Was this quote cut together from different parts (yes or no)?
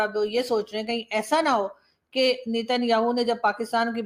no